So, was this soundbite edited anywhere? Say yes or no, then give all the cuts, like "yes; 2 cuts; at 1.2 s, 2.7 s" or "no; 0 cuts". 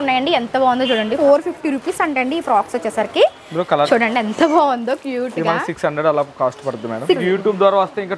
yes; 3 cuts; at 1.2 s, 3.9 s, 7.2 s